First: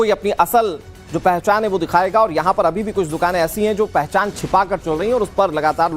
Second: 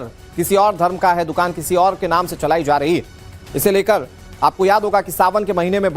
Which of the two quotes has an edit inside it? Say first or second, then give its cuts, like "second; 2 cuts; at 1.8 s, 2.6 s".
second; 1 cut; at 2.8 s